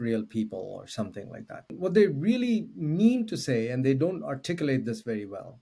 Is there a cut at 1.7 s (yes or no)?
yes